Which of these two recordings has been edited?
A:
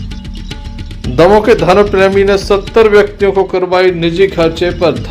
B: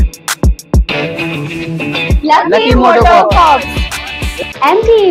A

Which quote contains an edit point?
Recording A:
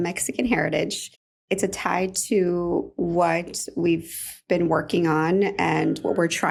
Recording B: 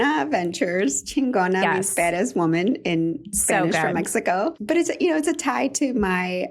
B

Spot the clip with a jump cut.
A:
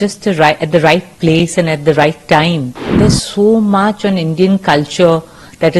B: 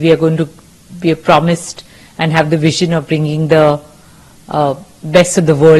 A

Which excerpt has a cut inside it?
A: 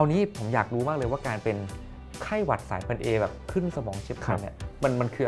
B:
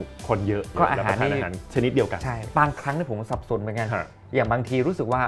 B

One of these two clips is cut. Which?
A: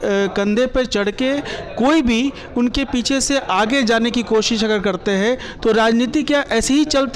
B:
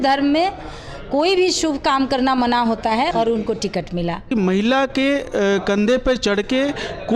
B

